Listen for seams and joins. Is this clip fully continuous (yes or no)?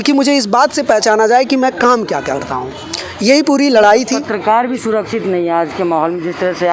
yes